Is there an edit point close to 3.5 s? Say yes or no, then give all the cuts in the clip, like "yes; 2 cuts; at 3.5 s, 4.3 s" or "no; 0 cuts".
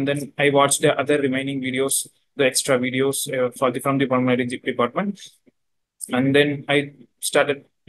yes; 1 cut; at 3.5 s